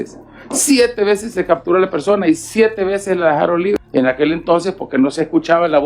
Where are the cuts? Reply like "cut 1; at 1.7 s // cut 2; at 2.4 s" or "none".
cut 1; at 3.8 s